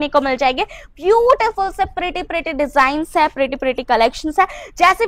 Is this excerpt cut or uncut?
uncut